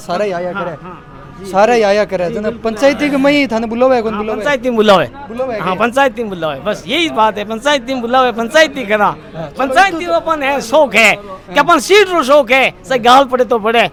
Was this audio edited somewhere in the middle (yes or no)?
no